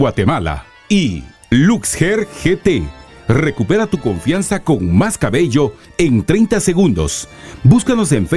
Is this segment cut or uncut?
cut